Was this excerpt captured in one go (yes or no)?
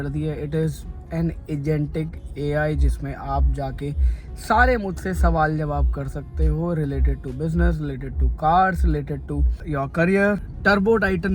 no